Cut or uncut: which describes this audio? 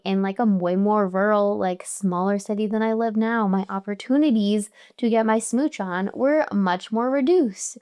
uncut